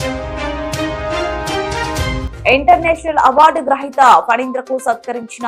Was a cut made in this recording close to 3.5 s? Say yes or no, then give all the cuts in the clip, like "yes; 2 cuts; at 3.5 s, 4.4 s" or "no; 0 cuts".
no; 1 cut; at 2.3 s